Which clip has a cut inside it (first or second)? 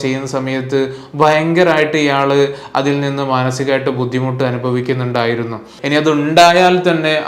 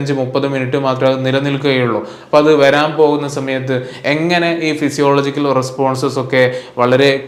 first